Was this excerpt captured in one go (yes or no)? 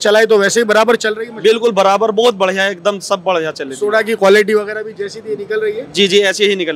yes